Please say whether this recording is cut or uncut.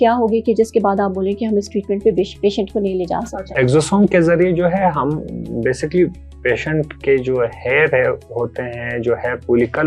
cut